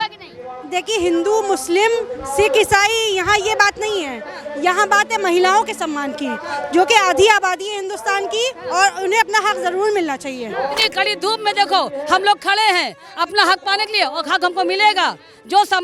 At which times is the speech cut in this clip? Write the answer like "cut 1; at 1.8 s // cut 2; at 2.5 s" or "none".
cut 1; at 10.8 s